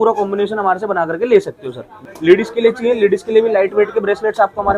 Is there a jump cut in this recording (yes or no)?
yes